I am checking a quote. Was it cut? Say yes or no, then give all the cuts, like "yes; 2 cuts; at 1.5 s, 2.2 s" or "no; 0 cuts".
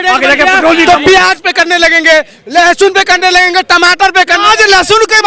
no; 0 cuts